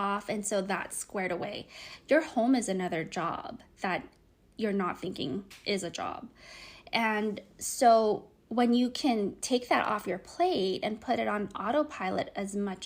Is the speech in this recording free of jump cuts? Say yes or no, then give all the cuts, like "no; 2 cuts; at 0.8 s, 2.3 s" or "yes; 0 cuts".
yes; 0 cuts